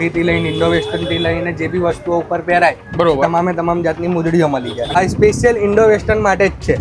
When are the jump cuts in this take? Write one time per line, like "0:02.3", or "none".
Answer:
0:05.0

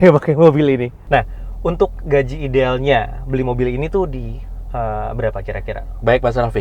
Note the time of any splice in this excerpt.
0:01.0

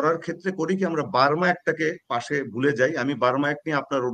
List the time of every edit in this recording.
none

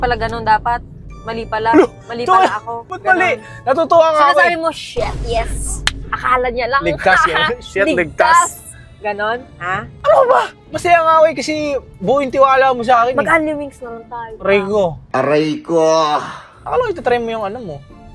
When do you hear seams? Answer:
none

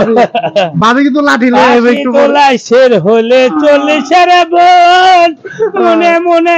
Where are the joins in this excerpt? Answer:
none

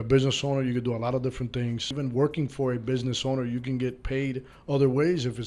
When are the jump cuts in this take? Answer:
0:01.9

